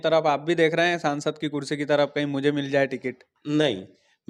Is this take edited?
no; 0 cuts

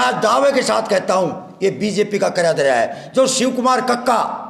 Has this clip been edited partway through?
no; 0 cuts

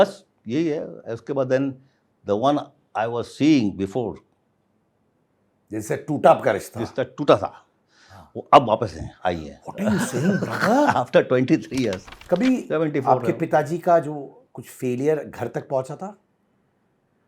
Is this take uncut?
no; 1 cut; at 12.1 s

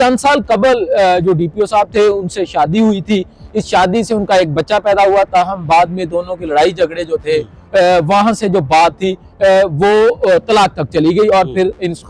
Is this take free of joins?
yes; 0 cuts

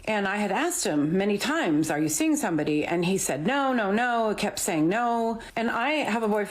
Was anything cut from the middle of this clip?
yes; 1 cut; at 5.5 s

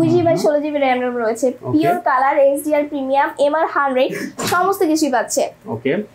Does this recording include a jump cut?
no; 0 cuts

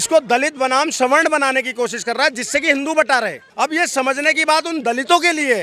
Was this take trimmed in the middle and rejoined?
yes; 1 cut; at 3.4 s

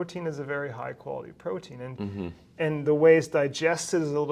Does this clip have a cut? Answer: no; 0 cuts

